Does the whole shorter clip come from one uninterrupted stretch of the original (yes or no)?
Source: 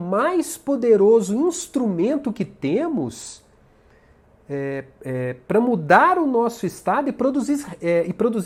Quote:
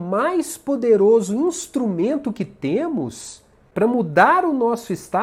no